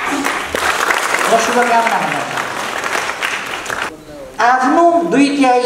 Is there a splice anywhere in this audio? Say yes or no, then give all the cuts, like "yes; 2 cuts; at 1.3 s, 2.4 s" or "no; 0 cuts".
yes; 1 cut; at 3.9 s